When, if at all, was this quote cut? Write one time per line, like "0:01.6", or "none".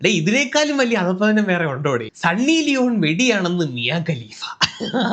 0:02.1